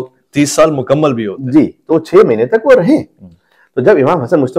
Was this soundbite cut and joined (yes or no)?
no